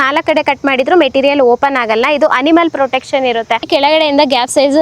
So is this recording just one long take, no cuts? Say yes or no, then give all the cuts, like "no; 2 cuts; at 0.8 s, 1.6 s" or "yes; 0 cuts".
no; 1 cut; at 3.7 s